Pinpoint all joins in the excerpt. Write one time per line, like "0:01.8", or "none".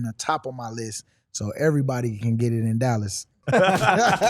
0:03.4